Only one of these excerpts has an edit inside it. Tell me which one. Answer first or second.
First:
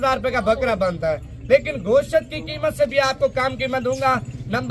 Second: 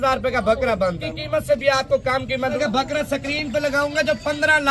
second